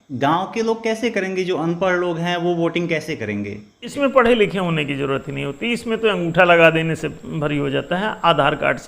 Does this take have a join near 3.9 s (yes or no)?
yes